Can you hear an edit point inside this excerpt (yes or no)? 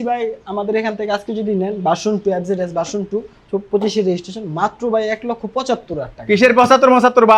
no